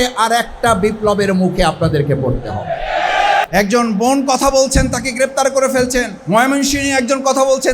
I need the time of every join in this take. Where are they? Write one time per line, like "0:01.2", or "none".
0:03.4
0:06.2